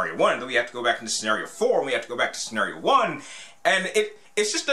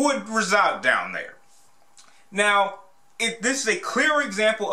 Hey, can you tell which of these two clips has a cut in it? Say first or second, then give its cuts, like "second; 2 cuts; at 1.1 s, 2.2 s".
second; 1 cut; at 3.7 s